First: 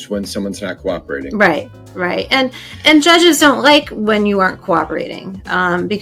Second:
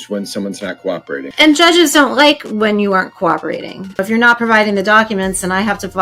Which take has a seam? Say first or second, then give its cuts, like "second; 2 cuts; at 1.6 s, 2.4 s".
second; 2 cuts; at 1.3 s, 4.0 s